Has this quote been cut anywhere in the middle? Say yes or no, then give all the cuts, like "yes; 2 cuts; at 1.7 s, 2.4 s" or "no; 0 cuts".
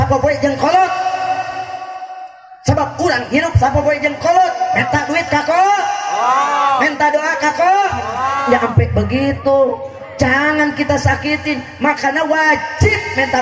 yes; 1 cut; at 8.4 s